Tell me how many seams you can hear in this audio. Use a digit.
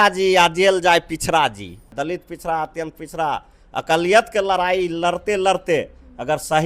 1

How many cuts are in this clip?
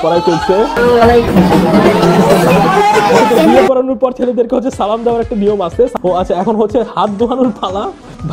2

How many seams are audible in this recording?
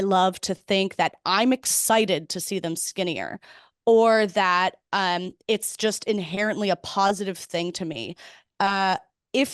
0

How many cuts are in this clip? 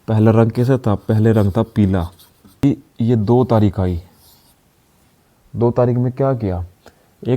1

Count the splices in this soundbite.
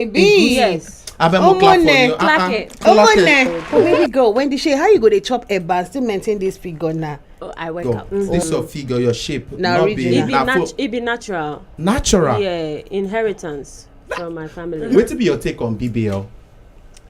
3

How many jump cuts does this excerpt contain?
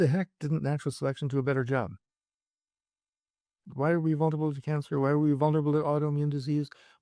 1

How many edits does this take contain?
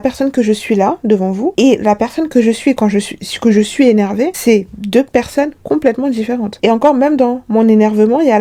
0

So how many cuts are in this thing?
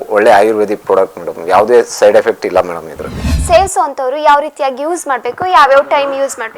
1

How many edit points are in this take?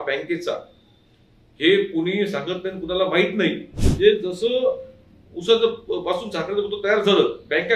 1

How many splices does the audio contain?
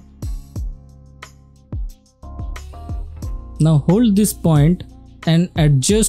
1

